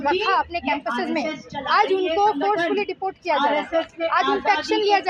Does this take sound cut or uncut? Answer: uncut